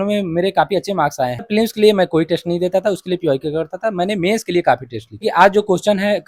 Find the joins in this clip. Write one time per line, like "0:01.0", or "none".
0:01.5
0:05.2